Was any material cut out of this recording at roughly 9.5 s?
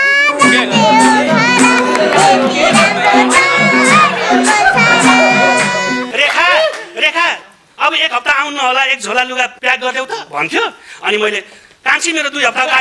yes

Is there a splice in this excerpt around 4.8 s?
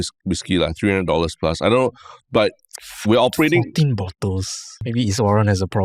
yes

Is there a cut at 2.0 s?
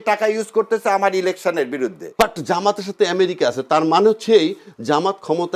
yes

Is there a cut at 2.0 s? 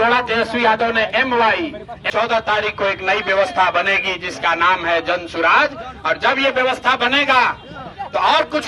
yes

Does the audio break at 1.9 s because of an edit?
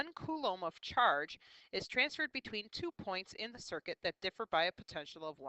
yes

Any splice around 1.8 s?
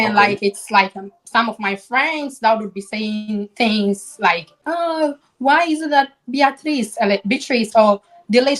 no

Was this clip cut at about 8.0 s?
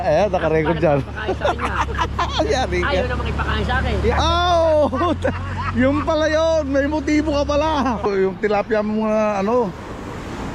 yes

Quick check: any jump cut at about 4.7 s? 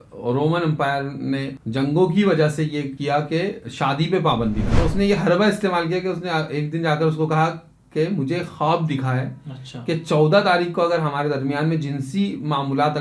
yes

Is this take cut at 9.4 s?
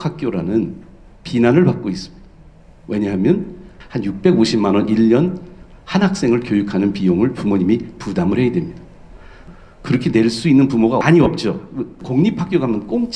yes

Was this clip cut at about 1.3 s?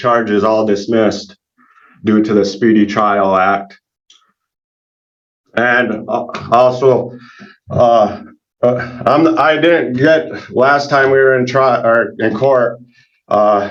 no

